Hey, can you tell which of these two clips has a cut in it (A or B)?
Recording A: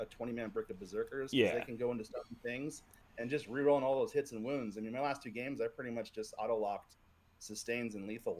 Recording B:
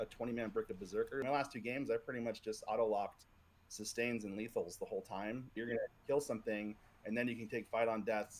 B